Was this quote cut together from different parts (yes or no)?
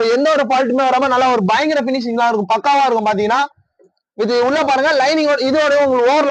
no